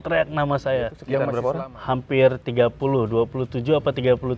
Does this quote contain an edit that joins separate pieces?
yes; 1 cut; at 1.1 s

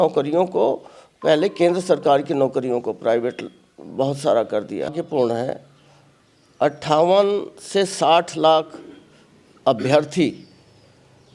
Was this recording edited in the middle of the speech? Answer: yes; 1 cut; at 4.9 s

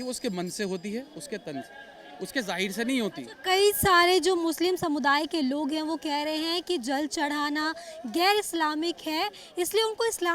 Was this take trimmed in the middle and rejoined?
no; 0 cuts

